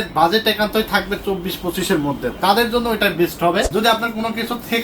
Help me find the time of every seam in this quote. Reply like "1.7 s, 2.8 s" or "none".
3.7 s